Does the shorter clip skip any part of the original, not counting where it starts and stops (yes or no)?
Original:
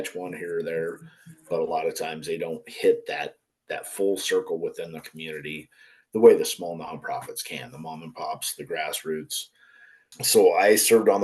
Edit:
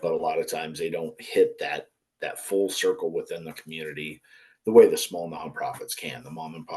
no